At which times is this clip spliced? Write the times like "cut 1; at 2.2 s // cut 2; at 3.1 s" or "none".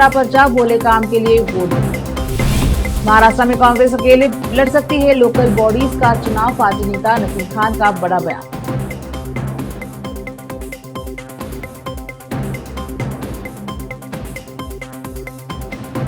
none